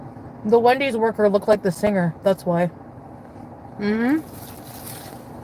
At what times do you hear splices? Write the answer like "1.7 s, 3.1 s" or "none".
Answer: 0.9 s

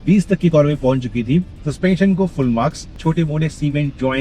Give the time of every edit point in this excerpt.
1.6 s, 3.0 s

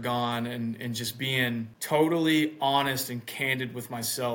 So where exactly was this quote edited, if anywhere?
1.8 s

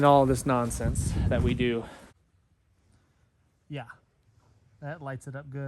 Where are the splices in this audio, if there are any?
2.2 s

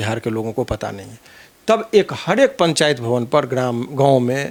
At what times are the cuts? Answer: none

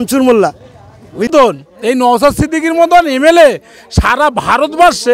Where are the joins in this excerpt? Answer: 1.3 s

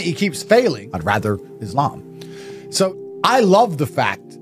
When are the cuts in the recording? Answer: 0.9 s, 2.9 s

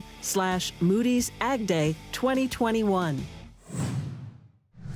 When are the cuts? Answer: 3.7 s

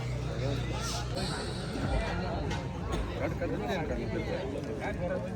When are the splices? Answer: none

